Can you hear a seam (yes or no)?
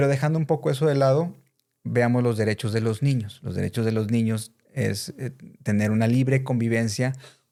no